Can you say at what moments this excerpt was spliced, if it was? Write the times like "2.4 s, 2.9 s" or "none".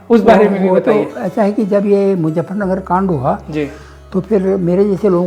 none